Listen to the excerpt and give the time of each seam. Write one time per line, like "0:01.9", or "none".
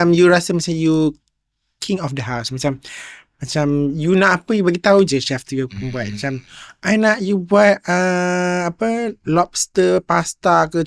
none